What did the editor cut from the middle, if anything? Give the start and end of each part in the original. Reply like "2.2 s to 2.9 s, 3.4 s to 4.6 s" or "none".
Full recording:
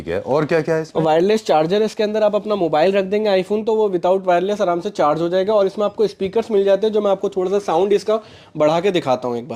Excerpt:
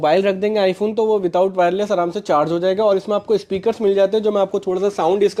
none